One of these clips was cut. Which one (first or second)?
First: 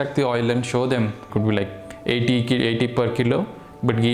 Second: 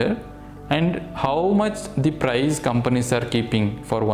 first